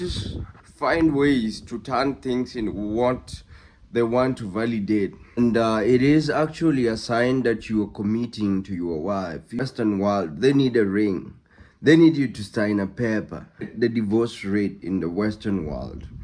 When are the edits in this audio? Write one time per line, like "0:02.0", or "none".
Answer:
0:05.4
0:09.6
0:13.7